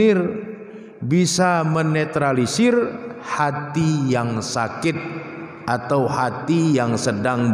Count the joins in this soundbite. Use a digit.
0